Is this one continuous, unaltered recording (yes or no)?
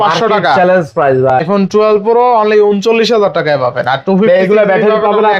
no